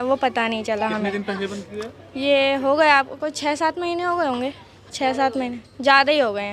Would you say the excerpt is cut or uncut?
uncut